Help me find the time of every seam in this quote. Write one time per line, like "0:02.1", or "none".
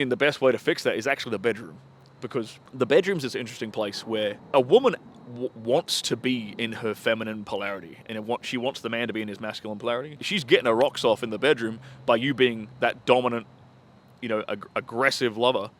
0:02.6
0:04.4
0:10.2